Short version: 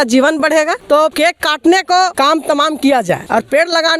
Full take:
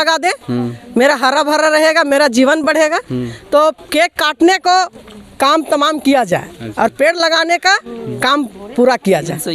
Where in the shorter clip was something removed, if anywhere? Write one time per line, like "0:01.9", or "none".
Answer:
0:01.1
0:02.1
0:03.2